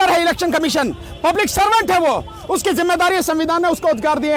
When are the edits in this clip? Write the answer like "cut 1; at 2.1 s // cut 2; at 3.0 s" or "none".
none